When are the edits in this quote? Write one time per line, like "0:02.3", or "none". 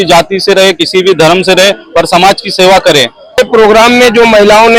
0:03.4